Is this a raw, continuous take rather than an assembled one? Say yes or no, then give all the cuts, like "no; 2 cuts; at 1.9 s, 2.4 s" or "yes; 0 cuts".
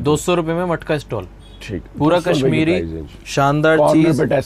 yes; 0 cuts